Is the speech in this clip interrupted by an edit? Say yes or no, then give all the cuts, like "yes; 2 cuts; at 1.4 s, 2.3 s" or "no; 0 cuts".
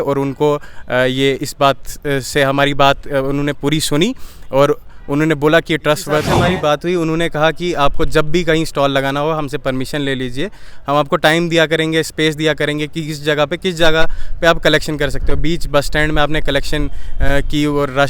yes; 1 cut; at 6.3 s